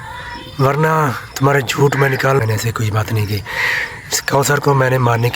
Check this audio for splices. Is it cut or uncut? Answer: cut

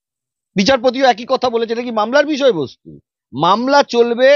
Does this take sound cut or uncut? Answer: uncut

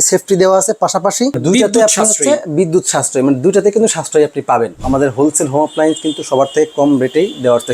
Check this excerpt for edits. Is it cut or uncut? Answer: cut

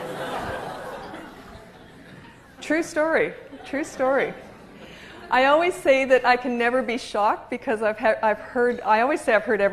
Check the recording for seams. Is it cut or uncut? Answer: cut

